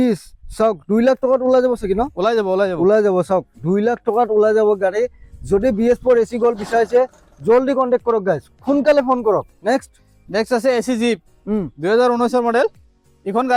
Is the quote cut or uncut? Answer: uncut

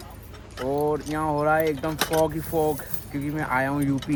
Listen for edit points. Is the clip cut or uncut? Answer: uncut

